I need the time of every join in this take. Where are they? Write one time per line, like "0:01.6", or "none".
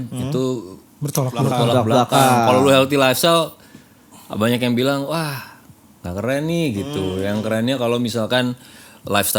none